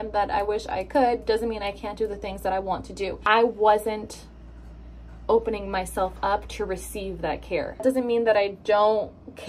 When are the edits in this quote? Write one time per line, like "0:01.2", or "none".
0:03.2
0:07.8

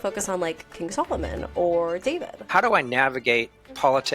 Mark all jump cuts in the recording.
0:02.4

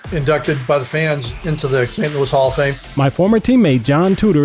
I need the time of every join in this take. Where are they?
0:02.8

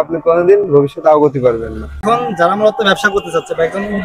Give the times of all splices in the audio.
0:02.0

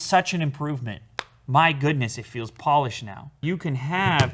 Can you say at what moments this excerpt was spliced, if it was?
0:03.4

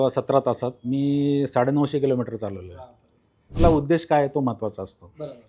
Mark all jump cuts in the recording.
0:03.6

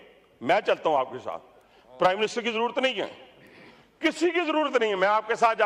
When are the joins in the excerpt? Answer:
none

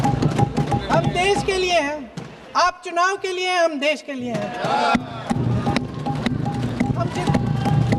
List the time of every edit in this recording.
none

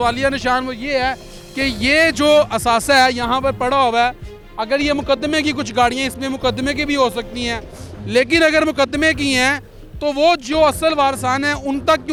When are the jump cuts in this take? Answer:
none

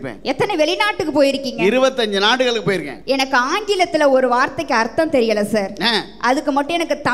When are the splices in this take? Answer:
0:02.9

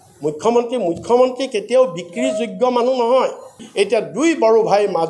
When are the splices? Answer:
0:03.6

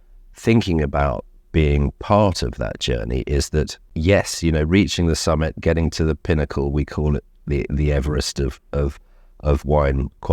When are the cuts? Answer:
0:03.8

